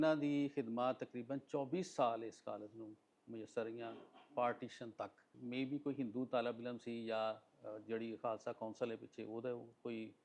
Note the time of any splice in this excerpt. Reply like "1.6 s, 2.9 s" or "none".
5.3 s

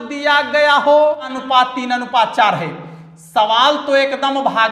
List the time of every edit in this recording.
1.4 s

